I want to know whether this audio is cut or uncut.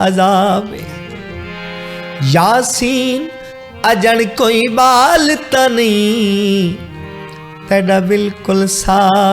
uncut